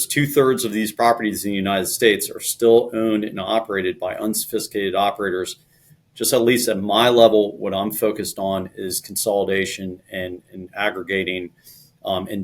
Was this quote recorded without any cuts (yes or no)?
no